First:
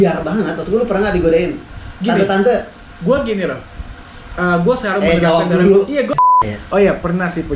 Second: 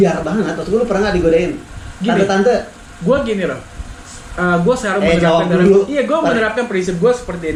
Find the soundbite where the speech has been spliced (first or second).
first